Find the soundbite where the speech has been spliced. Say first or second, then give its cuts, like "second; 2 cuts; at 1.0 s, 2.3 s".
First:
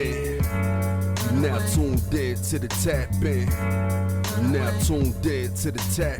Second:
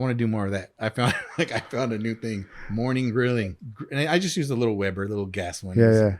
second; 1 cut; at 3.5 s